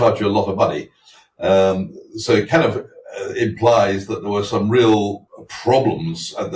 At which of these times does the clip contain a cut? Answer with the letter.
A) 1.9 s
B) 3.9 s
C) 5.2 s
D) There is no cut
C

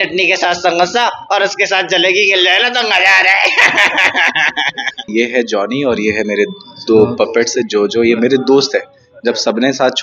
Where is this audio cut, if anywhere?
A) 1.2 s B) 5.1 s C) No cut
B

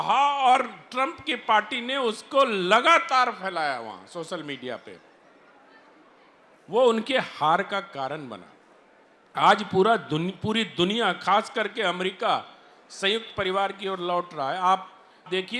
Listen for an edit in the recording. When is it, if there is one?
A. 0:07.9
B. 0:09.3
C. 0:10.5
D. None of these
D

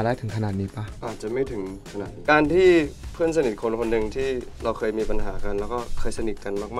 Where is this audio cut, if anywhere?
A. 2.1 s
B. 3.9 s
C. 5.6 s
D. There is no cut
A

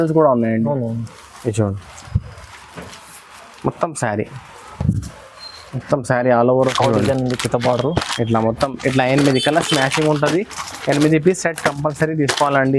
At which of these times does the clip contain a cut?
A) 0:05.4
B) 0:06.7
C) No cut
B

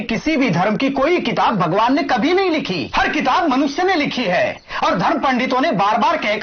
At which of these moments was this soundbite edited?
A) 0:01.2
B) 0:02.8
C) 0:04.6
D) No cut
B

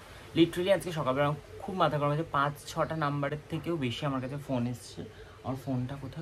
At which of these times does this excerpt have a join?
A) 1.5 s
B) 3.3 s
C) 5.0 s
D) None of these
D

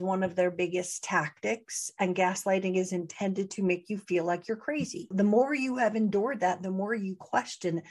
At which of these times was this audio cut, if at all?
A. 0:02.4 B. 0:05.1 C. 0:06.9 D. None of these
B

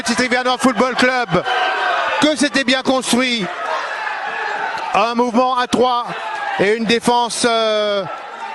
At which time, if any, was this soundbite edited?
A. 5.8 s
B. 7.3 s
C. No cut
C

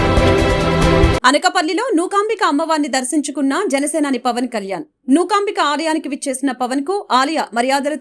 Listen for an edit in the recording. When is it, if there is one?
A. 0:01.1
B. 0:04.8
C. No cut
A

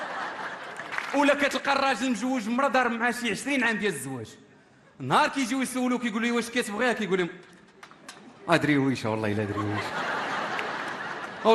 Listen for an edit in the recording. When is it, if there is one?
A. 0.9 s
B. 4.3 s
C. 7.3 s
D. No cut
A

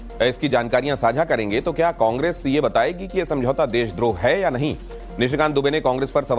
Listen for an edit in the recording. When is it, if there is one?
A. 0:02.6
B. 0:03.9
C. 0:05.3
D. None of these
A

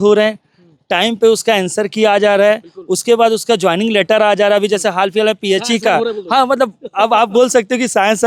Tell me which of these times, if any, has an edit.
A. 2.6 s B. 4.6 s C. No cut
C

